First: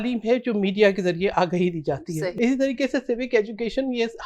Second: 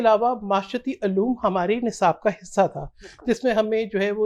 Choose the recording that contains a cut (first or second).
first